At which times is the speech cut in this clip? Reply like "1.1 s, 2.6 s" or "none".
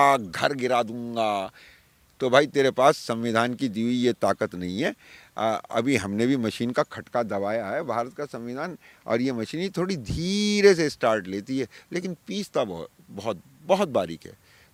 none

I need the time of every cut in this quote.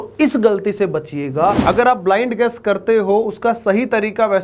1.6 s

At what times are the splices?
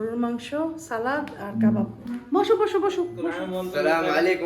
3.4 s

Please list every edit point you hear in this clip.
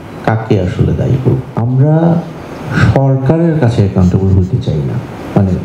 1.5 s

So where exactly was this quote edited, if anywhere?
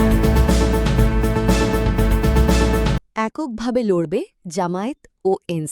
none

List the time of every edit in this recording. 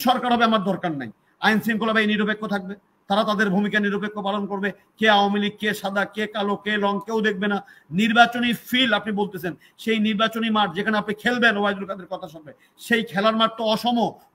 none

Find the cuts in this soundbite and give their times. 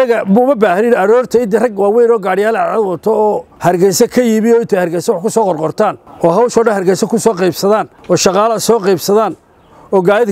3.5 s, 6.1 s, 7.9 s

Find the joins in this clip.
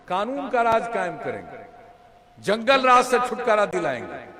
none

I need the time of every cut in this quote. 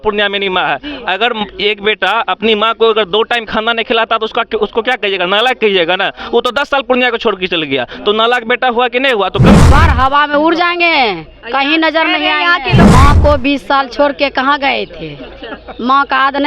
9.5 s, 12.8 s

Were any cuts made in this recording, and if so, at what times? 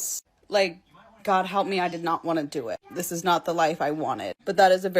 3.8 s

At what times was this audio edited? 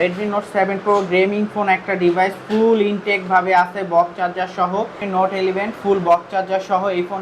5.0 s

